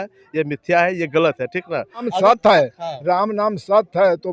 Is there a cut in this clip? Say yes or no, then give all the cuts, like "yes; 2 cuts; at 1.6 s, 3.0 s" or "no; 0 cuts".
yes; 1 cut; at 2.1 s